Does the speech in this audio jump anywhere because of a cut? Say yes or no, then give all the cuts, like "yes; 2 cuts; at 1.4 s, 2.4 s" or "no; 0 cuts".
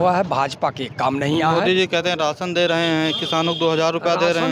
no; 0 cuts